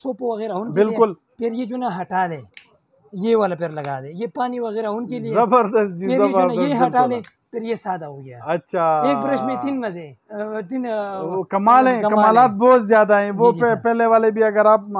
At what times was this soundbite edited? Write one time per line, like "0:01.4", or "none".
none